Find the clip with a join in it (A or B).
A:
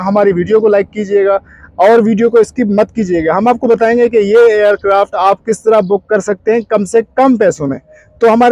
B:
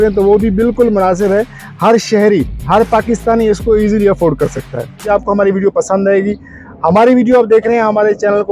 B